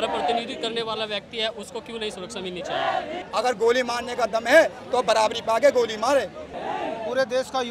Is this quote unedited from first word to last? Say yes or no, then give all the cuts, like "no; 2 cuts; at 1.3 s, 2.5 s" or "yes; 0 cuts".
no; 2 cuts; at 3.2 s, 6.5 s